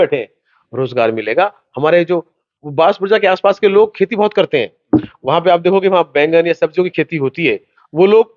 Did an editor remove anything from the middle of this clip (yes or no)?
no